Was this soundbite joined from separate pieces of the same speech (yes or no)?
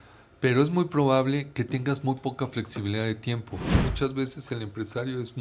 yes